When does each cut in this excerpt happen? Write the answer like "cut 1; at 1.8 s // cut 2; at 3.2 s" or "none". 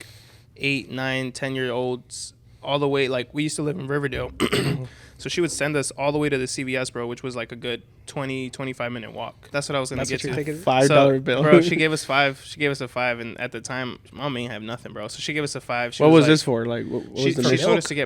cut 1; at 9.4 s